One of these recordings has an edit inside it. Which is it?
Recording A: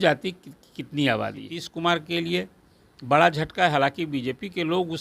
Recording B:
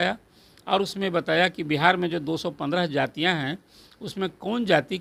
A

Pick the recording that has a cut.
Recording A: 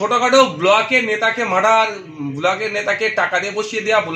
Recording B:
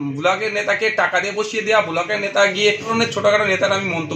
B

